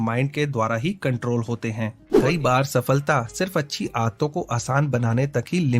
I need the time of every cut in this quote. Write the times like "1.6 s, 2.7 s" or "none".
2.0 s